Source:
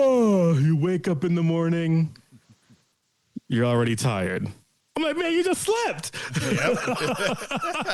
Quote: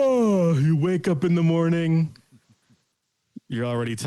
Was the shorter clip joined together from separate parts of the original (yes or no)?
no